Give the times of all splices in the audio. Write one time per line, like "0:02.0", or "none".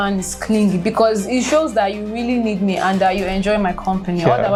none